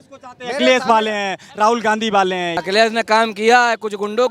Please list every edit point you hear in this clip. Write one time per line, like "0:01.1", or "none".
0:02.6

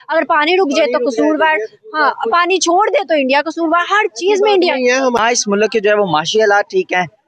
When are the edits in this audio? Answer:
0:05.2

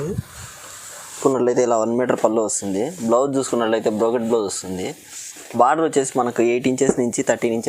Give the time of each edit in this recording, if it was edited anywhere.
0:01.2

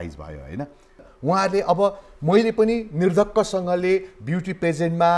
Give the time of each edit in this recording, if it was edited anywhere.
0:01.1

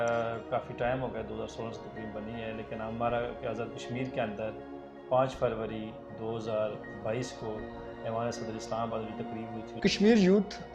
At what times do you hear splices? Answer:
0:09.7

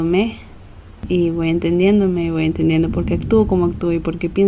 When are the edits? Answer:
0:01.0

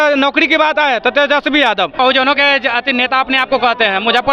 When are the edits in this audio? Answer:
0:02.0

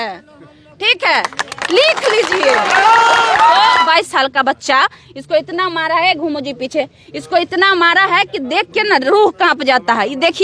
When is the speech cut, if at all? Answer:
0:03.8

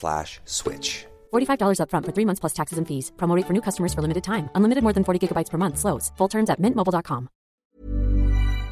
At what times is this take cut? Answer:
0:07.6

